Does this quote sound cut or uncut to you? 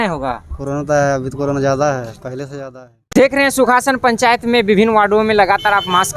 cut